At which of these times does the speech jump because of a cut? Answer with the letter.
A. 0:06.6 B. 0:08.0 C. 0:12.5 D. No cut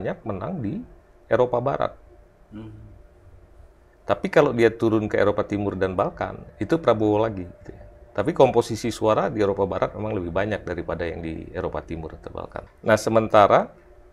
C